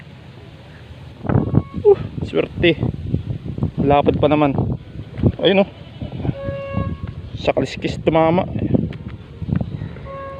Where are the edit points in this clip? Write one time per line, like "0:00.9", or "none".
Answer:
0:01.3